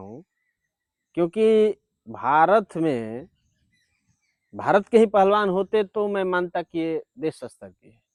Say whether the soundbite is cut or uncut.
uncut